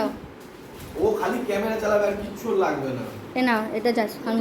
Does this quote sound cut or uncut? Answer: uncut